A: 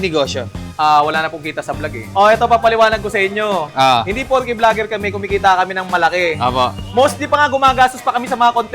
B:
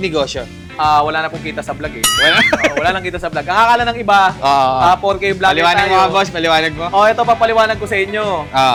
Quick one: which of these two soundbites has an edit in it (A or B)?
A